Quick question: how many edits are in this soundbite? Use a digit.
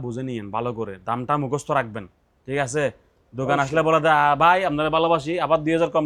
0